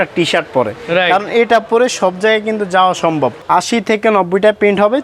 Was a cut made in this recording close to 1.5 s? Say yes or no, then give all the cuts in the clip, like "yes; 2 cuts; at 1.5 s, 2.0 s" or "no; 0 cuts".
no; 1 cut; at 3.4 s